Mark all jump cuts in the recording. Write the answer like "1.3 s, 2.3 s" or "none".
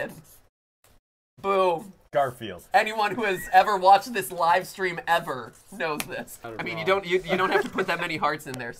6.5 s